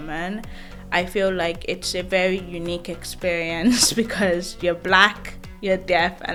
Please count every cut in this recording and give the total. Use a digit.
0